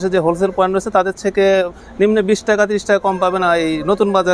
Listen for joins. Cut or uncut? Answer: uncut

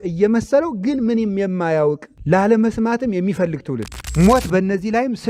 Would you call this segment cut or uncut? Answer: cut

